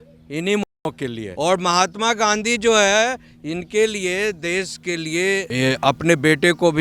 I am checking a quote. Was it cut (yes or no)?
yes